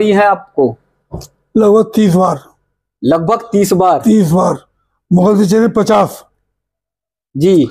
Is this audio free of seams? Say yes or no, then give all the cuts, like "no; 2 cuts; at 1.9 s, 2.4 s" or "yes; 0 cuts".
yes; 0 cuts